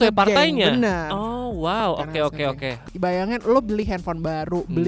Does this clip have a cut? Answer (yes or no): yes